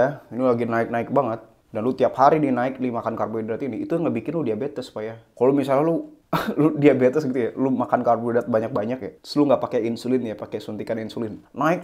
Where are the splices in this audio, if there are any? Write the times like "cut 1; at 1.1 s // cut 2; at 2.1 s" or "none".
none